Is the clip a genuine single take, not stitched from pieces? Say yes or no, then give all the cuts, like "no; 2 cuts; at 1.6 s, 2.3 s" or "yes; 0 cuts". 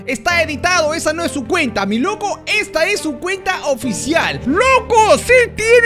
no; 1 cut; at 4.3 s